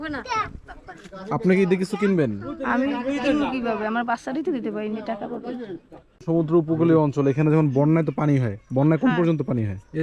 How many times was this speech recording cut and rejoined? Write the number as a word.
one